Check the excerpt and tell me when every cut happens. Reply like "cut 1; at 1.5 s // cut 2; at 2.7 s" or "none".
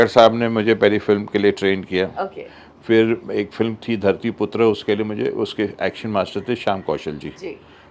none